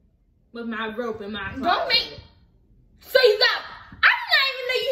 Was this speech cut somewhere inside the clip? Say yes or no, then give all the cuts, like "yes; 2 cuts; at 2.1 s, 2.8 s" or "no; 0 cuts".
no; 0 cuts